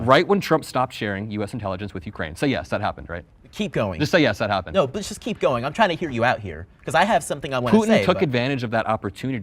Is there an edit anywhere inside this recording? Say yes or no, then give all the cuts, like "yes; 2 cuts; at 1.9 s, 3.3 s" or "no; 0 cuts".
no; 0 cuts